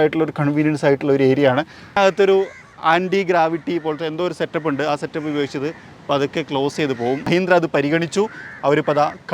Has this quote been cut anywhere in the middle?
yes; 2 cuts; at 2.0 s, 7.3 s

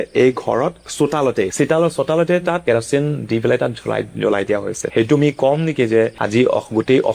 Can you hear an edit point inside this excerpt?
yes; 4 cuts; at 0.9 s, 2.6 s, 4.8 s, 6.2 s

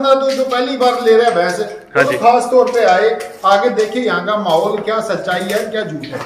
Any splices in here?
no; 0 cuts

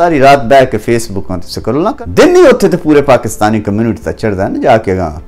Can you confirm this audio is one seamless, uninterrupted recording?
no; 1 cut; at 1.9 s

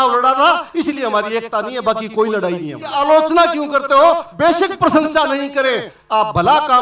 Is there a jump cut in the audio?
yes; 1 cut; at 2.9 s

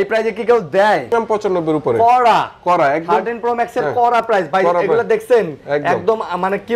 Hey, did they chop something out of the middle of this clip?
yes; 1 cut; at 1.1 s

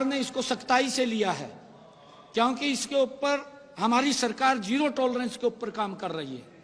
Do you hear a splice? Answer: no; 0 cuts

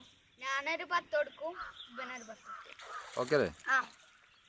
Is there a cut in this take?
no; 0 cuts

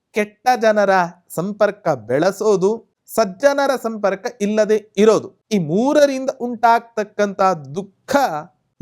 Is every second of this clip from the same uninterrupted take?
no; 2 cuts; at 2.9 s, 5.4 s

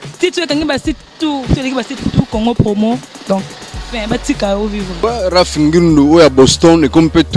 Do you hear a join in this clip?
no; 0 cuts

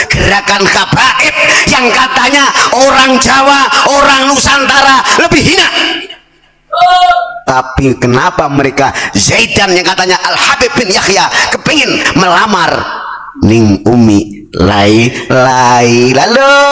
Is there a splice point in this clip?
no; 0 cuts

